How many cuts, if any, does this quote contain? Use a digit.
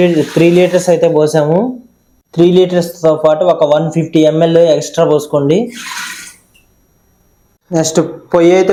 0